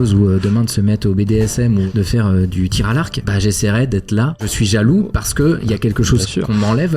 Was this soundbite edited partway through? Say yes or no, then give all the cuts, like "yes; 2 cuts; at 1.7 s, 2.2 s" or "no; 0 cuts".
yes; 3 cuts; at 1.9 s, 3.2 s, 4.5 s